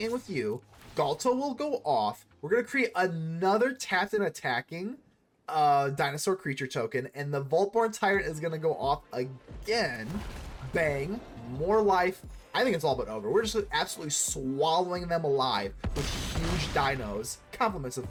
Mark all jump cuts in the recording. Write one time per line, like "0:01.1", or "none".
none